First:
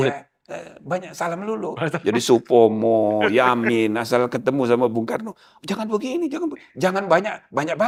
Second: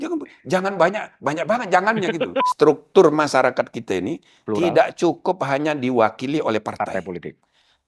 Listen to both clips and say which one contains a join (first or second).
second